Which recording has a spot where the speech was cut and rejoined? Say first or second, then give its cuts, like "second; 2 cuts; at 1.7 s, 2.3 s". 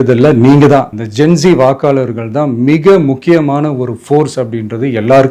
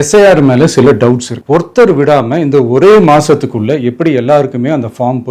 second; 1 cut; at 1.3 s